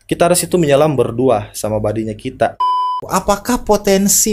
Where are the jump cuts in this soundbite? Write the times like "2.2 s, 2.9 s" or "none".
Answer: 3.0 s